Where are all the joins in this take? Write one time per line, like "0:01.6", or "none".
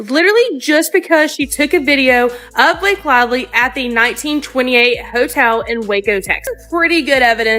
0:06.5